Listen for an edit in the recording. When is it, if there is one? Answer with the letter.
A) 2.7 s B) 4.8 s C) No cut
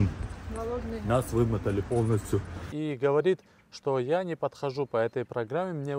A